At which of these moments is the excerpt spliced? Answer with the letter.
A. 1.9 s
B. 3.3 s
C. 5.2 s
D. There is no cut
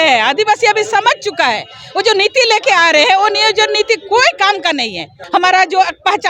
C